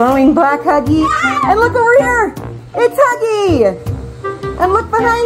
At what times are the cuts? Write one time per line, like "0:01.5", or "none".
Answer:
none